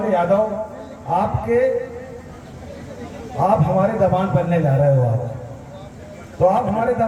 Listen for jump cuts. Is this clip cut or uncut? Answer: uncut